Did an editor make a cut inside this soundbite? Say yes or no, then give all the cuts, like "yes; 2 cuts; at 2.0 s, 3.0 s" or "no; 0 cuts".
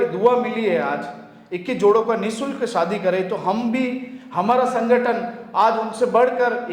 no; 0 cuts